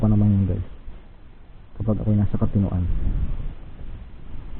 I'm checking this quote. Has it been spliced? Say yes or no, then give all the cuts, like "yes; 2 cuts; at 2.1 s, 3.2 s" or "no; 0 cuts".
yes; 1 cut; at 2.9 s